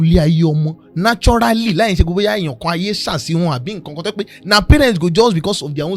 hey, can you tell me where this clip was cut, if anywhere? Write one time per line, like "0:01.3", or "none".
none